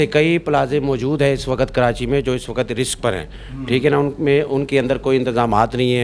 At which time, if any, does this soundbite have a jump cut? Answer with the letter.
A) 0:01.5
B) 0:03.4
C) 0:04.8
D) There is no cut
D